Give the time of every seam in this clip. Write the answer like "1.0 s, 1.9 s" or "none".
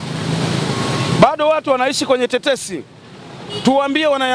none